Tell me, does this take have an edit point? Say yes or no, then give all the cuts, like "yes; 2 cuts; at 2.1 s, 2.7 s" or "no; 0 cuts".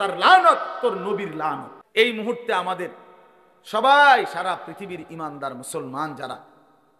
yes; 1 cut; at 1.7 s